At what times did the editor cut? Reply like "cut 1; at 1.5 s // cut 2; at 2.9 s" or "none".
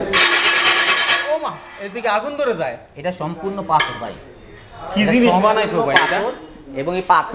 none